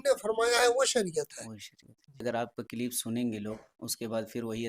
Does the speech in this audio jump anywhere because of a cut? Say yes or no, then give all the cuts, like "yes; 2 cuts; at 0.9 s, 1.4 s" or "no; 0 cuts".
yes; 1 cut; at 2.2 s